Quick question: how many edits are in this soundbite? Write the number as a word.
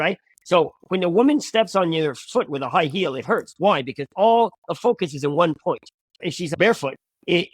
one